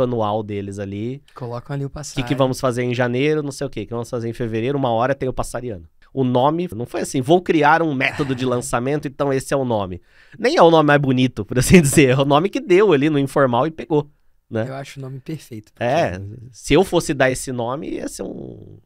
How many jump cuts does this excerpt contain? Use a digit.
3